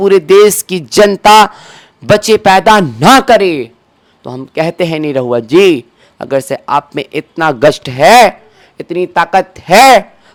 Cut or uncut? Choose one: uncut